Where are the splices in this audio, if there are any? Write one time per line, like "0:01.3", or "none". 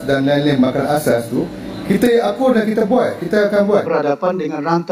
0:03.8